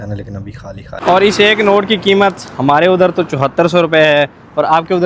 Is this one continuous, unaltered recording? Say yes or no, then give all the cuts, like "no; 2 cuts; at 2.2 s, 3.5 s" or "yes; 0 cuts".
no; 1 cut; at 0.9 s